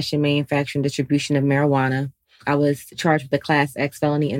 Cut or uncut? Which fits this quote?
cut